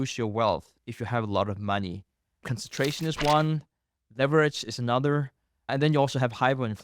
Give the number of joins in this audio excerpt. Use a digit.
2